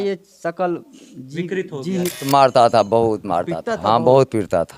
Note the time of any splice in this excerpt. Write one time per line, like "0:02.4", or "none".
0:02.2